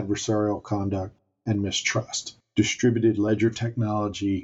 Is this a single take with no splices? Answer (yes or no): no